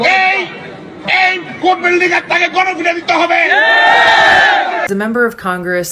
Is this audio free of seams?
no; 1 cut; at 5.0 s

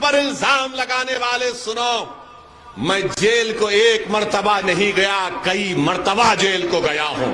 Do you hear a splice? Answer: no; 0 cuts

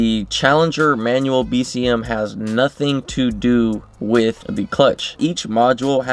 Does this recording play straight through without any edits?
no; 1 cut; at 5.2 s

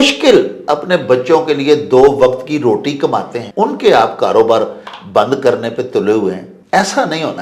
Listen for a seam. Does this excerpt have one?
yes; 2 cuts; at 3.4 s, 6.5 s

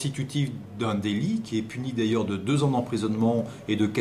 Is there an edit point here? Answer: no; 0 cuts

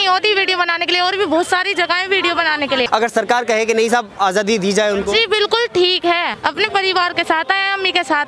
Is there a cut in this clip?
yes; 2 cuts; at 2.9 s, 6.3 s

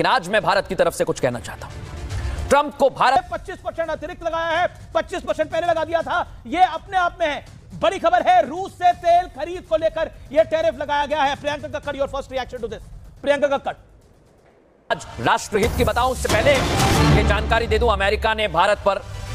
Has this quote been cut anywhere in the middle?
yes; 2 cuts; at 3.2 s, 14.8 s

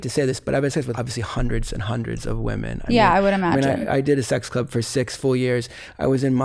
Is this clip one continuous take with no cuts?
no; 1 cut; at 1.0 s

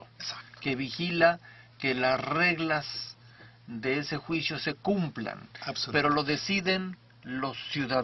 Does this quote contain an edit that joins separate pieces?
no; 0 cuts

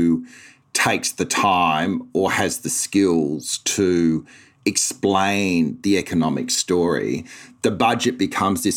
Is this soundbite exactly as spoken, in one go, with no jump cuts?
yes; 0 cuts

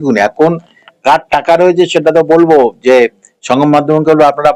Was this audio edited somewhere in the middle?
no; 0 cuts

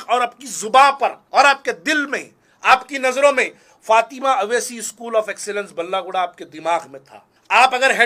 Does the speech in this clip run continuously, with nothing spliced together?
yes; 0 cuts

